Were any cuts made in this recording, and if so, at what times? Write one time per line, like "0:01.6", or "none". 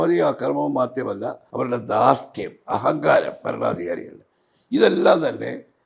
0:01.4